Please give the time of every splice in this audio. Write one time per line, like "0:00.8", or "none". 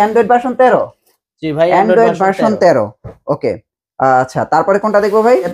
none

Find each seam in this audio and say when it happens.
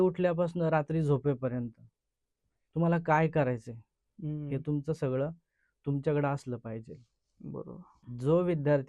0:07.9

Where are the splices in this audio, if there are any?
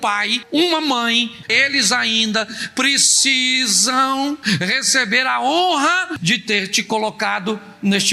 0:01.5
0:06.2

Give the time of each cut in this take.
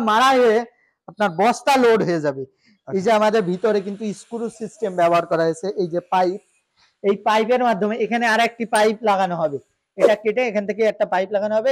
none

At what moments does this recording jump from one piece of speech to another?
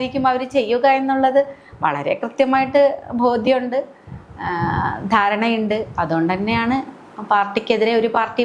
none

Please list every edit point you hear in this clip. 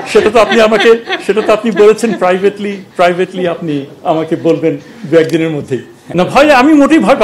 0:06.0

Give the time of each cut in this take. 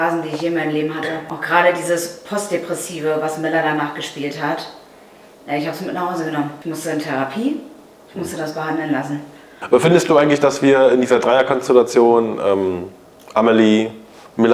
0:01.3
0:06.6
0:09.6

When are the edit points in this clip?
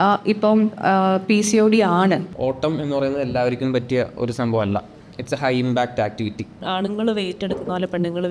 0:02.3
0:06.6

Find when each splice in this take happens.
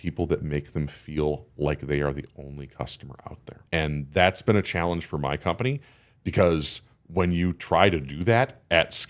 0:03.6

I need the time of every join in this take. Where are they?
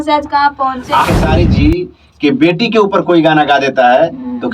0:01.0

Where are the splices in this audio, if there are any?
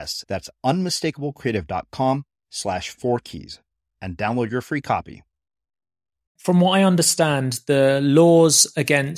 0:06.3

